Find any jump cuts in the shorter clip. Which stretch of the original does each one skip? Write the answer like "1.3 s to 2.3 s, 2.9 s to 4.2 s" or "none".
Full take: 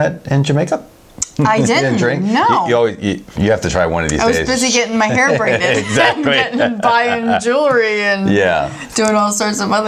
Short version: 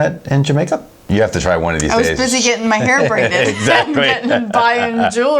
1.0 s to 3.3 s